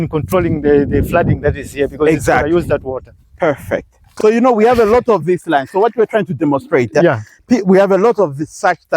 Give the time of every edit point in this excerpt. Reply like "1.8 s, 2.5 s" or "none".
4.1 s